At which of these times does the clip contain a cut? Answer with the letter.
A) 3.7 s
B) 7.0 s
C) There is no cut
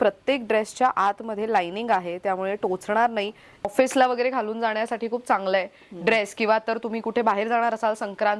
A